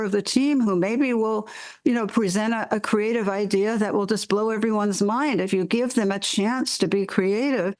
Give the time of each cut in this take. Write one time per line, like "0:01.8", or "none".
none